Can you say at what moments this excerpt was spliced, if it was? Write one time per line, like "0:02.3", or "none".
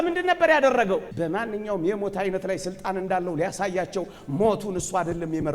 0:01.1